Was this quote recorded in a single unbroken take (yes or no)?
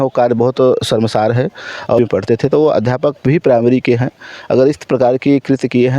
no